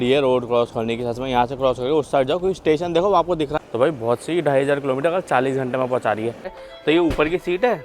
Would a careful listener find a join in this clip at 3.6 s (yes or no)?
yes